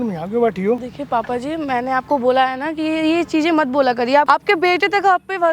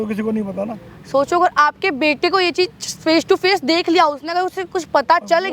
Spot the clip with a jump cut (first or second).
first